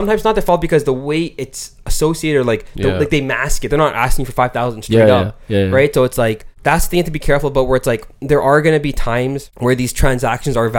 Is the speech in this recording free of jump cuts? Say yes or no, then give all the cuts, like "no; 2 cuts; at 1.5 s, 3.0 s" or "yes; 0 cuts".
no; 2 cuts; at 6.5 s, 9.5 s